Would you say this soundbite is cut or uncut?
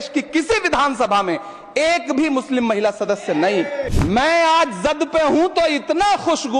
cut